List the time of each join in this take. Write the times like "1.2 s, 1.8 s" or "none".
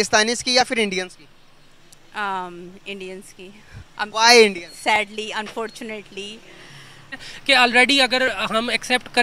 7.3 s